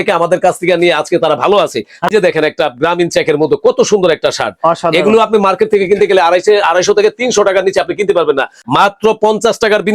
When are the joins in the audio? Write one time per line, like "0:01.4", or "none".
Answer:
0:02.1
0:08.6